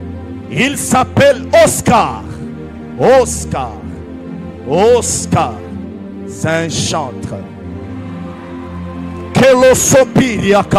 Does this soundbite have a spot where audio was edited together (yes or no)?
no